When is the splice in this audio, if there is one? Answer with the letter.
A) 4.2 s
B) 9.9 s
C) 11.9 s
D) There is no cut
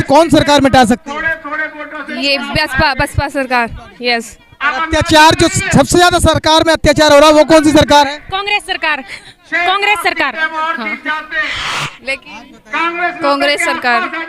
C